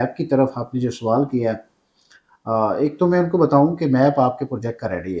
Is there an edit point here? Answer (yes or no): no